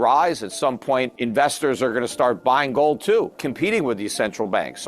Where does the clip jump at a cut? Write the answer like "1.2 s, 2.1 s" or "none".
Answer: 1.2 s, 3.4 s